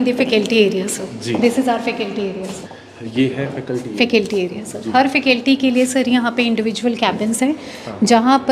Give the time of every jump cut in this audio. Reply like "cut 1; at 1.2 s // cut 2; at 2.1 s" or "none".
cut 1; at 2.6 s